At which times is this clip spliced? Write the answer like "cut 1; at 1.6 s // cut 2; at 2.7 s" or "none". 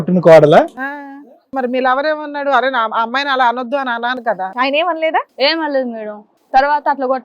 cut 1; at 1.5 s // cut 2; at 4.3 s